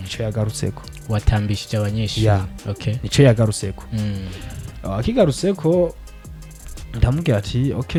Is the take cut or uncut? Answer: uncut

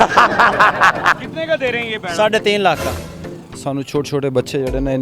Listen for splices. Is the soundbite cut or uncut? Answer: cut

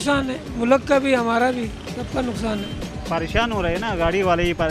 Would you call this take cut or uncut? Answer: cut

